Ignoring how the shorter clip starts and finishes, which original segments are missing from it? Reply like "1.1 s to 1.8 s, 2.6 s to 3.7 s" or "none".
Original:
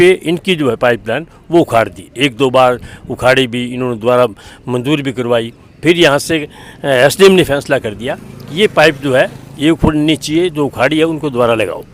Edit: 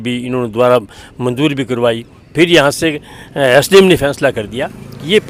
none